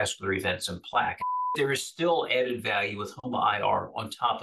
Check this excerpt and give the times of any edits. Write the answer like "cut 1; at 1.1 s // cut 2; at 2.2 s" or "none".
cut 1; at 1.2 s